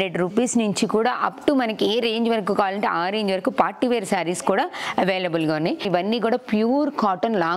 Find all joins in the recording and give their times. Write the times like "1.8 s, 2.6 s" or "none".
5.9 s

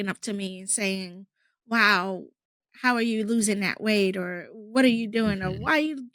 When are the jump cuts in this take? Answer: none

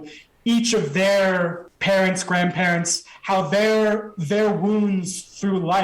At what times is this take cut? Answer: 1.6 s

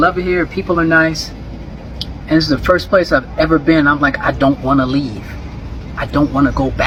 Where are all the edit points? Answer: none

